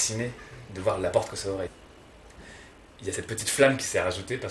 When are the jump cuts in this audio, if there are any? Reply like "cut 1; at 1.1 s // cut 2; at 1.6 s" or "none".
cut 1; at 1.7 s